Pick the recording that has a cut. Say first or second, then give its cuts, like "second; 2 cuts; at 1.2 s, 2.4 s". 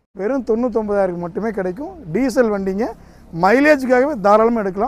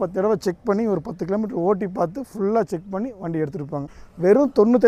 second; 1 cut; at 4.0 s